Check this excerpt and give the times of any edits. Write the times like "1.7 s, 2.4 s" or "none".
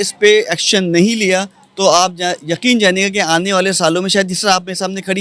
none